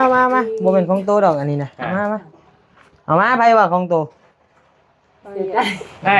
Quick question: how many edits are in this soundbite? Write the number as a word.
zero